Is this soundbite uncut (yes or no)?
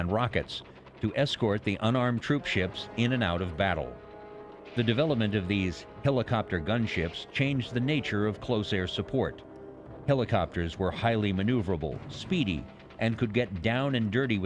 no